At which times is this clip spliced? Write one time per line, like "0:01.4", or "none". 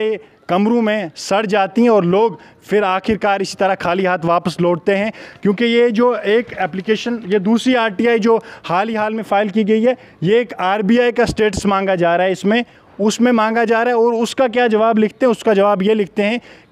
none